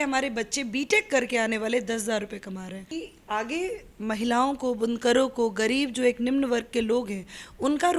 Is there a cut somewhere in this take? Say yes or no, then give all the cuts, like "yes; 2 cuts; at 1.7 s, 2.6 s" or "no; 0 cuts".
yes; 1 cut; at 2.9 s